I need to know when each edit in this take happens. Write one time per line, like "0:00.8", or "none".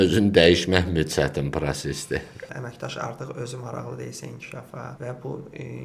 0:02.5
0:04.9